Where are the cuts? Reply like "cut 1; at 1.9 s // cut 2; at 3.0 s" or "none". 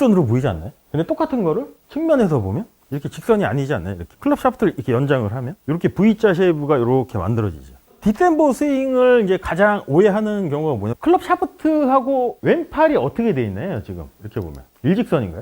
cut 1; at 10.9 s